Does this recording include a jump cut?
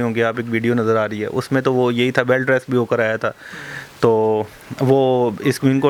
no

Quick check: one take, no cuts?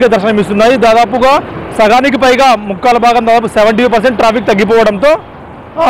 yes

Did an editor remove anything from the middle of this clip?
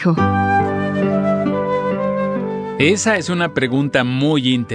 no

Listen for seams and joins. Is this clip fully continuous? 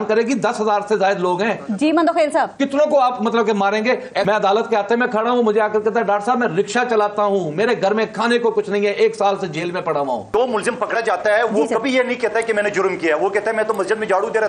no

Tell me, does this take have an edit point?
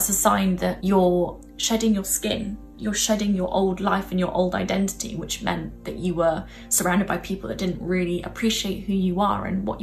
yes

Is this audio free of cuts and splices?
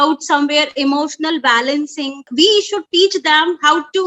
no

